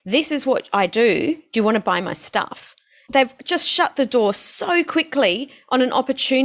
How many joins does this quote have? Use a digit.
1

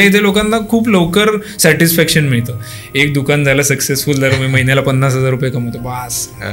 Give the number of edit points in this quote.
0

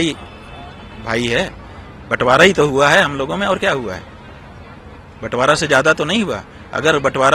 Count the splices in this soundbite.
0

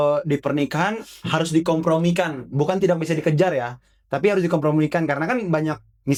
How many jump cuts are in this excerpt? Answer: 0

